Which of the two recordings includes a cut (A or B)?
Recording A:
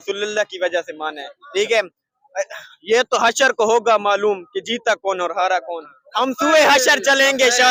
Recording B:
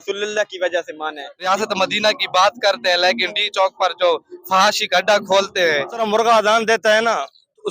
B